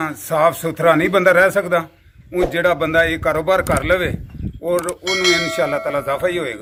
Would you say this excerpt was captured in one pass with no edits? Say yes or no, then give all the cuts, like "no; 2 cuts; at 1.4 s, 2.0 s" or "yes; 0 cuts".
yes; 0 cuts